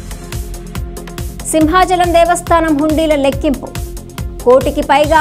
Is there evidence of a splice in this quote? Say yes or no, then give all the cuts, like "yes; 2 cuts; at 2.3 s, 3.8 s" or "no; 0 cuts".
yes; 1 cut; at 0.9 s